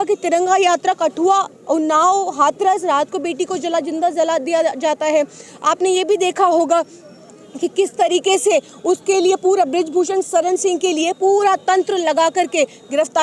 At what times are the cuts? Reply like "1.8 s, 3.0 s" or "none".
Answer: none